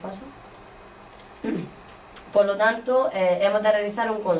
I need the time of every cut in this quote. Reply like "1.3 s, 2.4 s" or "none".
none